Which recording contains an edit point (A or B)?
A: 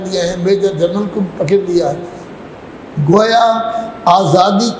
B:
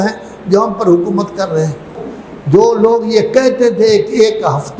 B